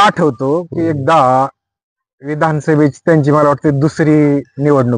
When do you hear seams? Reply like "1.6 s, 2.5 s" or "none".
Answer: none

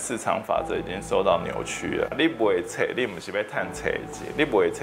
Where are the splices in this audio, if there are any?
2.1 s

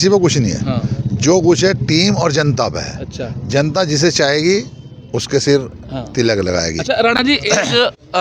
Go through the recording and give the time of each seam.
none

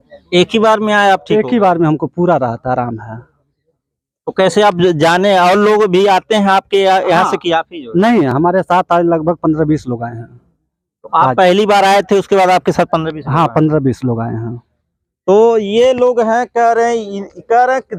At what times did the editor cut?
none

